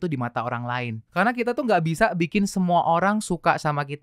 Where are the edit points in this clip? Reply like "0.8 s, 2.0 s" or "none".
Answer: 1.0 s